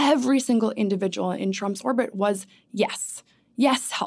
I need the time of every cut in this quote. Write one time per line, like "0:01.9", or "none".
0:01.4